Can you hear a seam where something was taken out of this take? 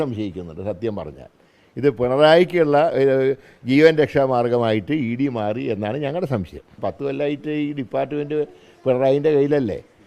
yes; 1 cut; at 6.7 s

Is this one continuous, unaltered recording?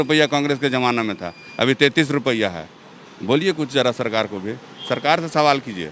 yes; 0 cuts

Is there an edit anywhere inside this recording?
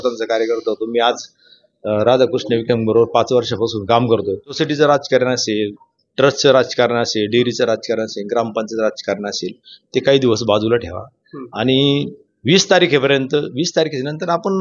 yes; 1 cut; at 4.5 s

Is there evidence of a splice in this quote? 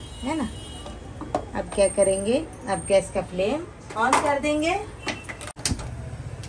no; 0 cuts

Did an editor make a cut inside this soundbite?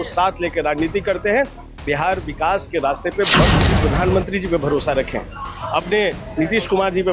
yes; 1 cut; at 3.7 s

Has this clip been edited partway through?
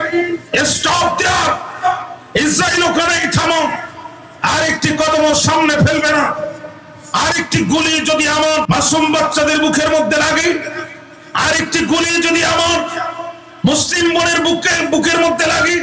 yes; 1 cut; at 8.7 s

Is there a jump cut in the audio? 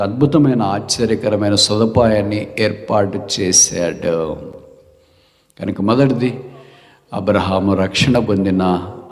no; 0 cuts

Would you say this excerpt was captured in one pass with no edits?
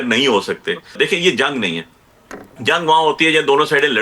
no; 1 cut; at 0.9 s

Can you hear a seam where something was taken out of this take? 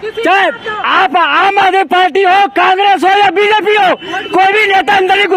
no; 0 cuts

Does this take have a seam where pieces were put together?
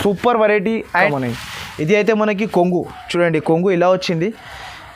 yes; 1 cut; at 0.9 s

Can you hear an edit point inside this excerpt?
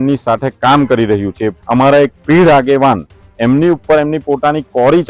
yes; 1 cut; at 1.6 s

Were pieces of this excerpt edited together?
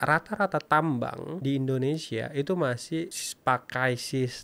yes; 2 cuts; at 1.3 s, 3.2 s

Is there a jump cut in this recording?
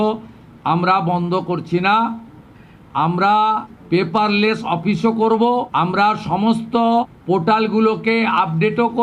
yes; 3 cuts; at 3.7 s, 5.7 s, 7.2 s

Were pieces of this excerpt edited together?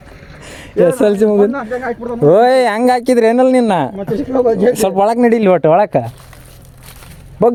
no; 0 cuts

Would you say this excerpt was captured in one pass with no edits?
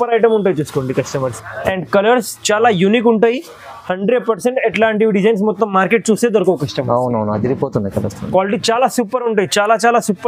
no; 1 cut; at 1.4 s

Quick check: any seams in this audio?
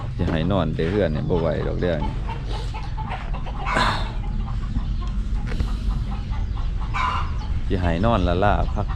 no; 0 cuts

